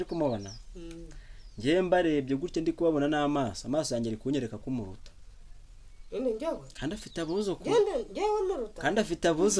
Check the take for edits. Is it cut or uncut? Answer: uncut